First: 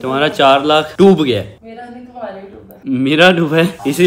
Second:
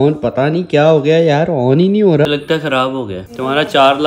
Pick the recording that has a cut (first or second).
second